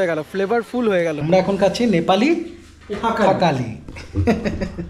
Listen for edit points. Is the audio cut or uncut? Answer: cut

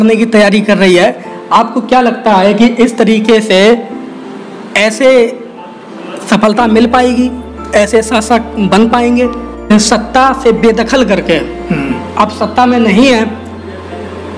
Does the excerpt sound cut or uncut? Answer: cut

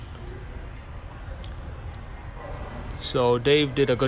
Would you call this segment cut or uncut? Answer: uncut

